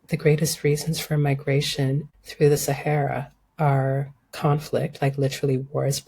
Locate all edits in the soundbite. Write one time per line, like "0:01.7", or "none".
0:02.2